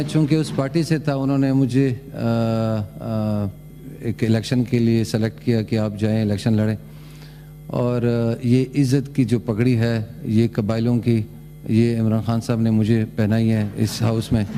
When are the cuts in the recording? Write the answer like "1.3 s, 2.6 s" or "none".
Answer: none